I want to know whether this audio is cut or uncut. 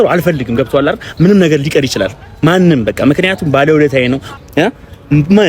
cut